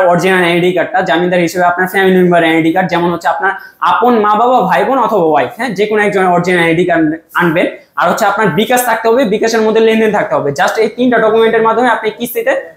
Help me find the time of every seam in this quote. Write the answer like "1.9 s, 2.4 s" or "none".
none